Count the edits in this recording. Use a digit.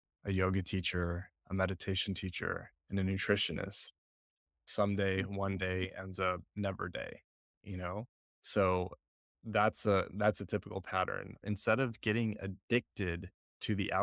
2